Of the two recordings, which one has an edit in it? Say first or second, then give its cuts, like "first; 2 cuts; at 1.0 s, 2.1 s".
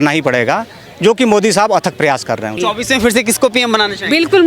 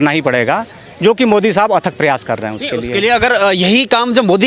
first; 1 cut; at 2.5 s